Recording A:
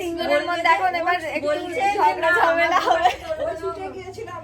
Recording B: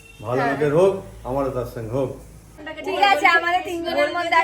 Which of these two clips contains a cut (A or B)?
B